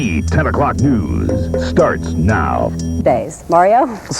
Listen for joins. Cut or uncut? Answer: cut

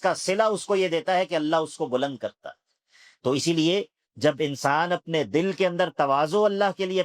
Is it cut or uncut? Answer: uncut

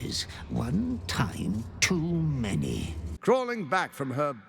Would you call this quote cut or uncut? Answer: cut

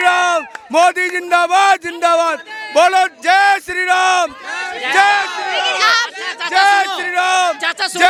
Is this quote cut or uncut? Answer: uncut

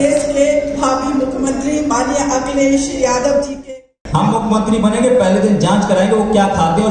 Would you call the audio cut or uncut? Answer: cut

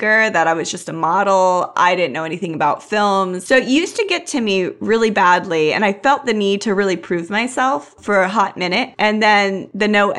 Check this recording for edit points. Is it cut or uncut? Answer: cut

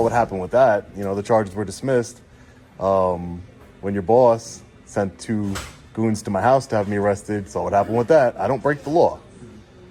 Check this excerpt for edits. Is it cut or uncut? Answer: uncut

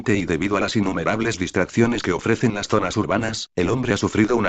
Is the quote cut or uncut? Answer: cut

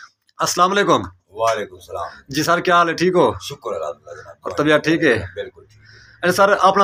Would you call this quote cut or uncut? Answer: uncut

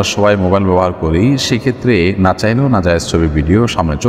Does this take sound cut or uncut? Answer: uncut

